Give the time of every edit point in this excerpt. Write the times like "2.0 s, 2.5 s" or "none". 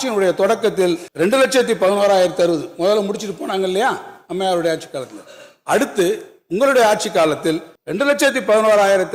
1.1 s